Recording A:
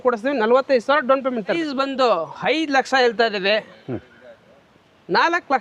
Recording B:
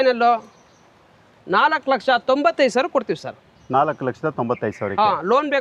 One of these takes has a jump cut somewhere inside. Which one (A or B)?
A